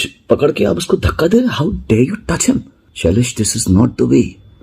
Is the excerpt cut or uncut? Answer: cut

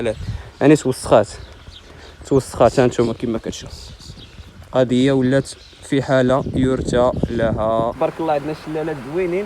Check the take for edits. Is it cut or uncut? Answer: cut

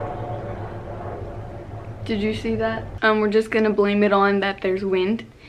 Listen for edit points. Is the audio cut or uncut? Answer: cut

